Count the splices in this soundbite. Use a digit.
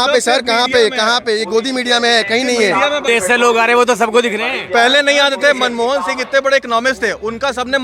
1